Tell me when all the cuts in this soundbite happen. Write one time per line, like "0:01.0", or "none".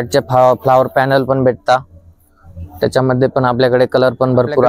none